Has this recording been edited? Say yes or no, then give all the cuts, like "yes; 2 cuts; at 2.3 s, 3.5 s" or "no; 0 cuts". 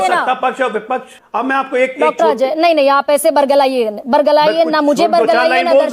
yes; 1 cut; at 1.1 s